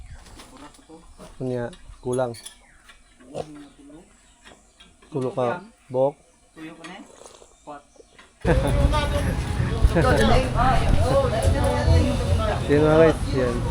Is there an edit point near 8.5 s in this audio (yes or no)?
yes